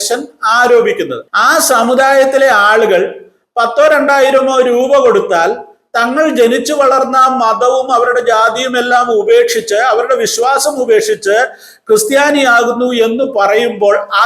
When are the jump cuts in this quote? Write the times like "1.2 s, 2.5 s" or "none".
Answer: 1.2 s